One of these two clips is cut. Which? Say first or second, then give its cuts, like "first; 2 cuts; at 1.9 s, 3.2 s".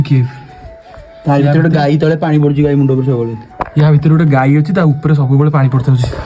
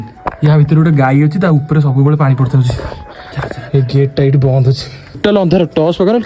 second; 1 cut; at 5.2 s